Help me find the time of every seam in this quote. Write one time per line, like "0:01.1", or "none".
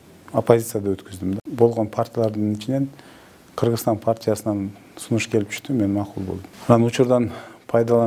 0:01.5
0:06.5